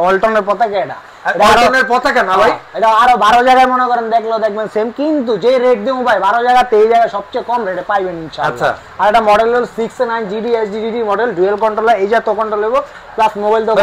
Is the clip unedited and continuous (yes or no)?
yes